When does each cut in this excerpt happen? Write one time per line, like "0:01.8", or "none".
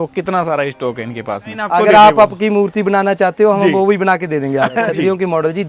0:01.6
0:04.8